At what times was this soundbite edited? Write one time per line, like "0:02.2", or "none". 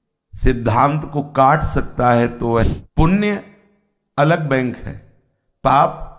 0:02.7